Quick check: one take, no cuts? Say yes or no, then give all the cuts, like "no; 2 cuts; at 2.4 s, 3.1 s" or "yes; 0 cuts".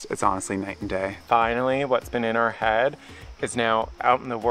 no; 1 cut; at 1.2 s